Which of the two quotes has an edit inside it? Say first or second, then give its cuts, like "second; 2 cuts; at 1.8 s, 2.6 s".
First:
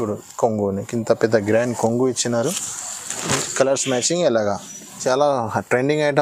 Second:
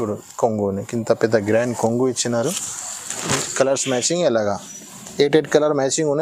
first; 1 cut; at 5.0 s